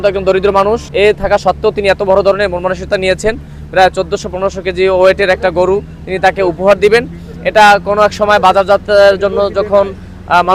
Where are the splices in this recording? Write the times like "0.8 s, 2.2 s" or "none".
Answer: none